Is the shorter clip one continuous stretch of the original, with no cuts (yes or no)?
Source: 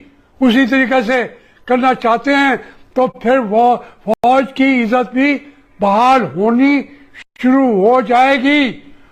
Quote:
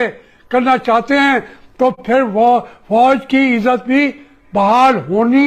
no